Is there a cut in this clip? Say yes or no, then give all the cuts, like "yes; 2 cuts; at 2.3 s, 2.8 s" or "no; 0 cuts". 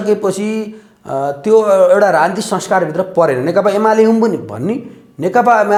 no; 0 cuts